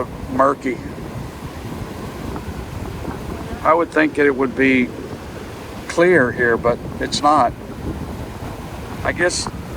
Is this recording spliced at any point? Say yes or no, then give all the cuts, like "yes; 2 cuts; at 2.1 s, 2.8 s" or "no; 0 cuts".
yes; 1 cut; at 8.4 s